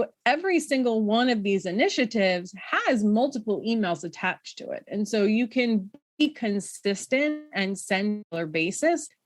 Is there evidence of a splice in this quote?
yes; 1 cut; at 8.3 s

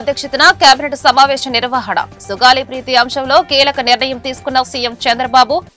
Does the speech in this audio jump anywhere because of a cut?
no; 0 cuts

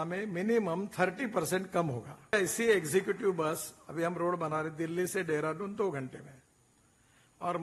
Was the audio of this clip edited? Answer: yes; 1 cut; at 2.3 s

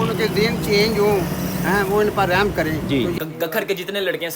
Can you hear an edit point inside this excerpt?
yes; 1 cut; at 3.1 s

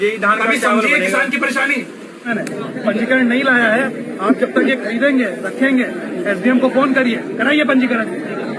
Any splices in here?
yes; 1 cut; at 2.3 s

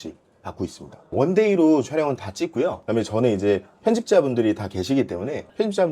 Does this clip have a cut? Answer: yes; 2 cuts; at 1.1 s, 2.8 s

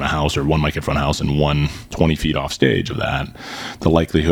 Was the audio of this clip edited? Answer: yes; 1 cut; at 1.8 s

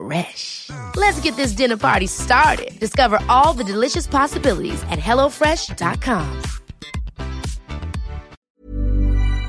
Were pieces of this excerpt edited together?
yes; 1 cut; at 8.4 s

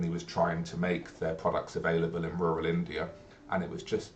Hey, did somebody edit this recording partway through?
yes; 1 cut; at 3.3 s

